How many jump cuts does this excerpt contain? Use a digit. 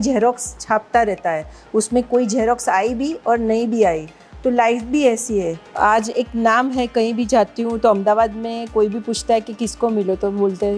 1